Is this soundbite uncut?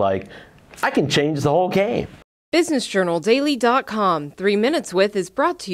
no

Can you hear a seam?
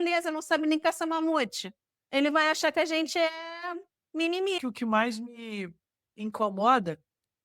yes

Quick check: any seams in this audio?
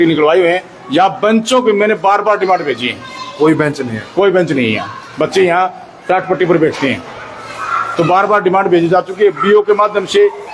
no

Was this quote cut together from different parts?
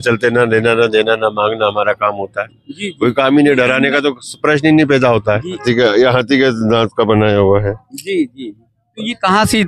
yes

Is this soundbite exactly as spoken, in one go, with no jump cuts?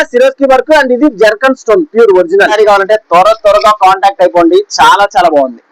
no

